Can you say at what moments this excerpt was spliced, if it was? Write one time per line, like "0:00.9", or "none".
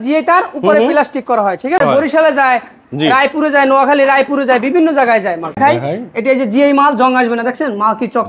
0:01.8
0:05.6